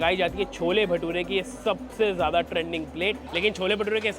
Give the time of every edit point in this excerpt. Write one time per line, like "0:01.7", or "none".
0:03.3